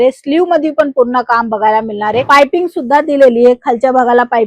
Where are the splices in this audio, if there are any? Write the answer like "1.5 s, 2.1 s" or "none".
2.2 s